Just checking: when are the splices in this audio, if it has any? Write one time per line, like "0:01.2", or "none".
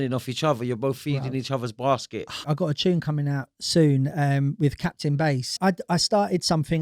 0:02.4
0:05.6